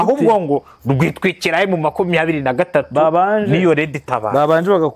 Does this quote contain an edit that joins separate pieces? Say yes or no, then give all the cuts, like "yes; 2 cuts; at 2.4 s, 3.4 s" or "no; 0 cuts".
no; 0 cuts